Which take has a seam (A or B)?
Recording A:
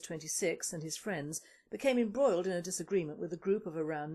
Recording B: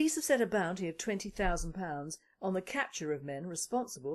B